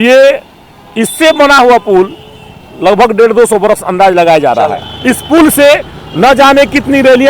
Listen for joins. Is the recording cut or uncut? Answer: cut